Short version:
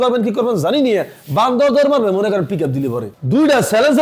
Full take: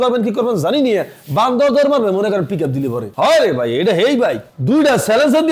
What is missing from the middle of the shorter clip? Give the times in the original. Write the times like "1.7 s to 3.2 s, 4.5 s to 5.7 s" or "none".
3.1 s to 4.4 s